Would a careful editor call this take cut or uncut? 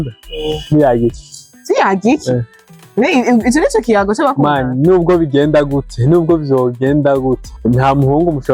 cut